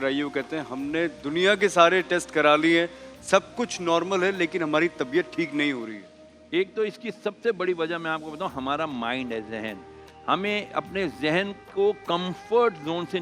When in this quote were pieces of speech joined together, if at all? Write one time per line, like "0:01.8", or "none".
none